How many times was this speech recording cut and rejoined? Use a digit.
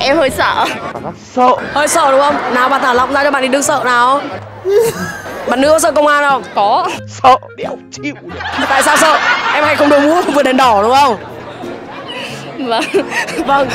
0